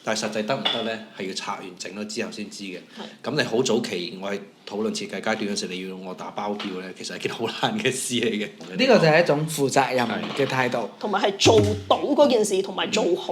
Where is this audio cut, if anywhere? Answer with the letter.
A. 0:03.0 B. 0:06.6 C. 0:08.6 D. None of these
C